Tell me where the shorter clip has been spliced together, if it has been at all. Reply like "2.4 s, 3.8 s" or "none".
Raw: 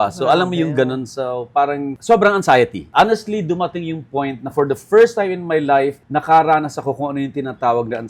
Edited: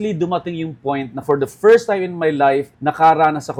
none